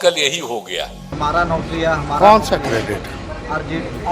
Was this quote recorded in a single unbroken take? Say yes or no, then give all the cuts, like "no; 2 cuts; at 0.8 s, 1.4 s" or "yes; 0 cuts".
no; 1 cut; at 1.0 s